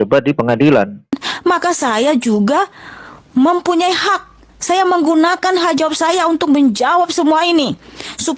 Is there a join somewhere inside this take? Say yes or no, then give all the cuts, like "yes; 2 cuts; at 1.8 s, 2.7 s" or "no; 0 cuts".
yes; 1 cut; at 1.2 s